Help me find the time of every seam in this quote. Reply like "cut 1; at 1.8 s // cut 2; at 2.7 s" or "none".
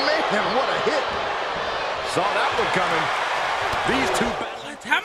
none